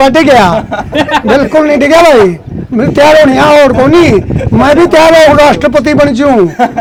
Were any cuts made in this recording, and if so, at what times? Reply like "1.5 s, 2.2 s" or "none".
none